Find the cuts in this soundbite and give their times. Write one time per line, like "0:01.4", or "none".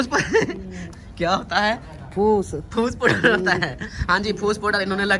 none